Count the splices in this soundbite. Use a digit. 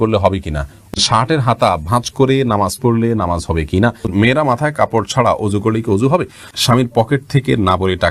3